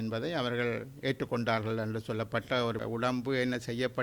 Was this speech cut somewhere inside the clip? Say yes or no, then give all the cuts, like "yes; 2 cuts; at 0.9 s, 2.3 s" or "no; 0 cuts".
yes; 1 cut; at 2.8 s